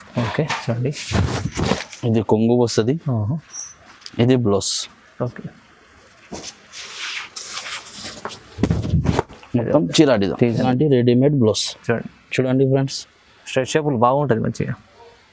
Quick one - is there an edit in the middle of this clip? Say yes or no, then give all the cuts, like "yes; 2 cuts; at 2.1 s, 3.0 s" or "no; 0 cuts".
yes; 1 cut; at 10.6 s